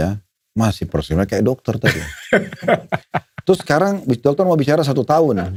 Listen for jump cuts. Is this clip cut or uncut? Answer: uncut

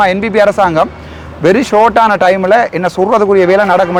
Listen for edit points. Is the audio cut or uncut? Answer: uncut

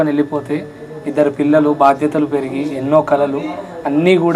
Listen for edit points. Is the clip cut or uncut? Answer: uncut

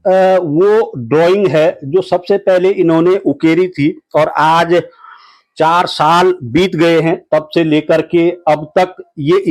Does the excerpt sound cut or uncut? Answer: uncut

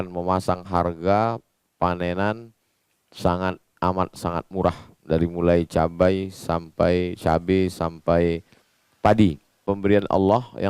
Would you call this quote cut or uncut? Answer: cut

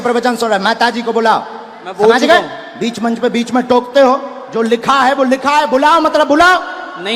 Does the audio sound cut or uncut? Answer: uncut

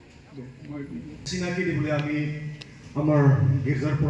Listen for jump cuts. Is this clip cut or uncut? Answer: cut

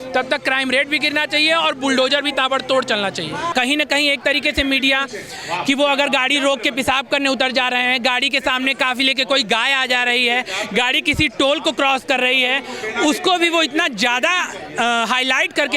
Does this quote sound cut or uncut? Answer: cut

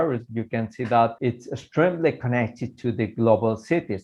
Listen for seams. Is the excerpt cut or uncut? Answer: cut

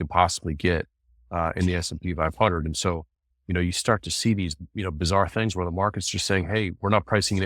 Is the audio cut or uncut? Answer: uncut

